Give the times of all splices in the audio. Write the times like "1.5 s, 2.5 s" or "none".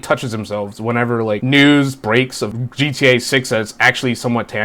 1.4 s, 2.5 s